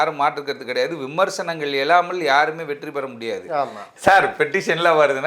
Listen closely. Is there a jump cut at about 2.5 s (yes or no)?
no